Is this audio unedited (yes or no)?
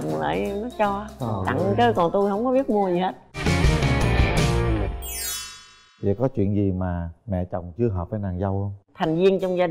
yes